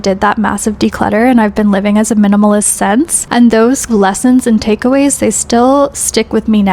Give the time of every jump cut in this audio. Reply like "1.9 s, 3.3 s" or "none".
3.2 s, 3.9 s